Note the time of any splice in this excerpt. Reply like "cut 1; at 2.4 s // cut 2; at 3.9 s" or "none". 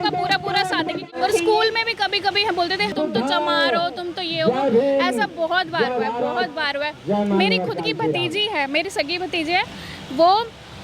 cut 1; at 1.1 s // cut 2; at 2.9 s